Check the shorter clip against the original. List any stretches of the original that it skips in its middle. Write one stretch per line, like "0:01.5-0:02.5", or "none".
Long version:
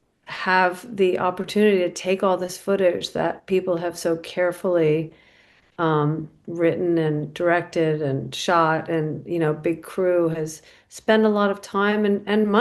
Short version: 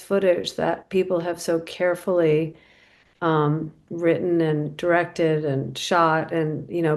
none